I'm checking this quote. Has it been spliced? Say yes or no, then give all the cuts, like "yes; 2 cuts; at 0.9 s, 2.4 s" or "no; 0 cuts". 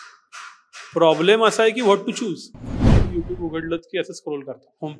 yes; 1 cut; at 3.0 s